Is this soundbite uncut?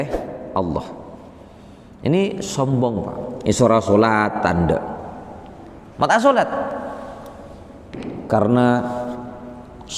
yes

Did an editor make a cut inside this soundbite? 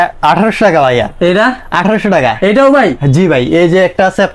no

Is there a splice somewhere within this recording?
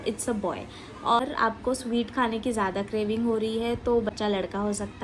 yes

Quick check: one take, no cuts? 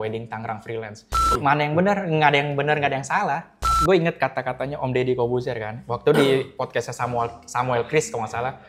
no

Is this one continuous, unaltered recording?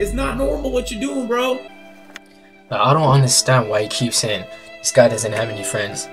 no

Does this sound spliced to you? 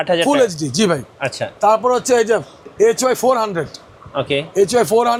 no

